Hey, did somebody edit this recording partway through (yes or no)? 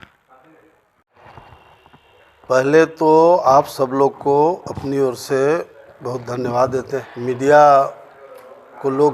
yes